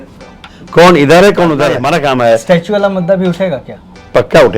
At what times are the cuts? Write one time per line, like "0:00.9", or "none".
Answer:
0:01.9